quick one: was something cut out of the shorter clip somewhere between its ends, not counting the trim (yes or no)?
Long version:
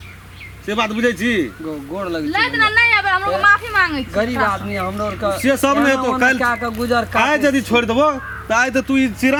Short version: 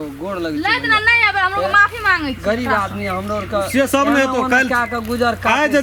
no